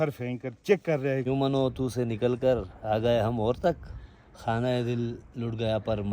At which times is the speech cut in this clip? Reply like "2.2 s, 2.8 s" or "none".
1.2 s